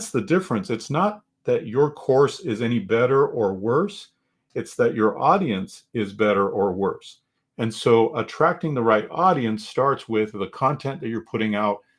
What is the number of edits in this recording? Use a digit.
0